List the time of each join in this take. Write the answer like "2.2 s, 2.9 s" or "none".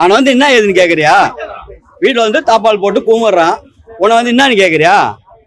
none

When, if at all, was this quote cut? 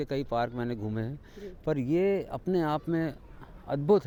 none

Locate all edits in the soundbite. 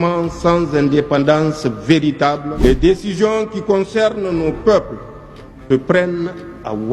2.5 s

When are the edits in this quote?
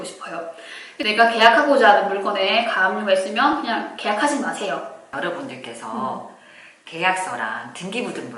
1.0 s, 5.0 s

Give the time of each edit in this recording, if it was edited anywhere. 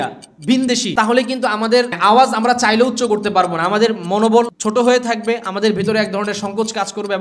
0.9 s, 1.9 s, 4.6 s

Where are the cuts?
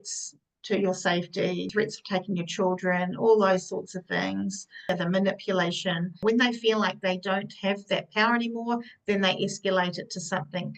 1.7 s, 4.9 s, 6.2 s

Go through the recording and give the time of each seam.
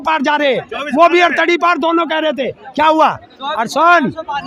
none

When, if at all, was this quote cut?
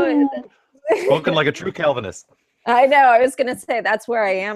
none

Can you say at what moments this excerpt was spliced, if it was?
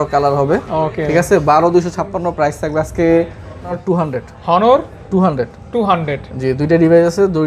3.8 s

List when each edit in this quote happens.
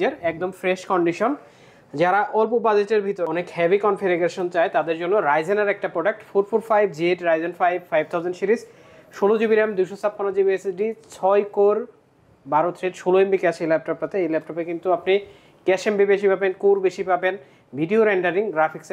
none

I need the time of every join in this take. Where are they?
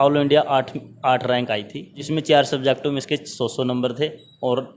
2.0 s

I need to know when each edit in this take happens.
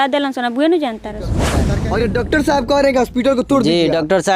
1.6 s

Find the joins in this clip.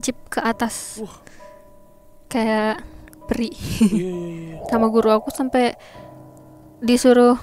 4.5 s

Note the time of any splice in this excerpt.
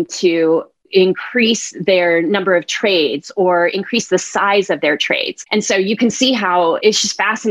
none

